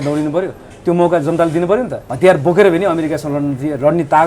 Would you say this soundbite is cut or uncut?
cut